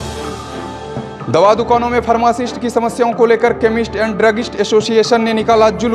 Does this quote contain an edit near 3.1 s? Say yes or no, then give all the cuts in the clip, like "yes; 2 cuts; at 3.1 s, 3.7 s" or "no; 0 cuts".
no; 1 cut; at 1.1 s